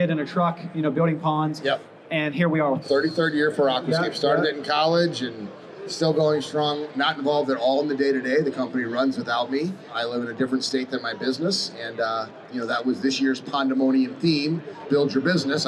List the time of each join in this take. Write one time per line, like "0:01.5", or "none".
0:02.8
0:09.9
0:14.8